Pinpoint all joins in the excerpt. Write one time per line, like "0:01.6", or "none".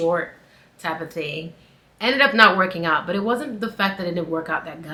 none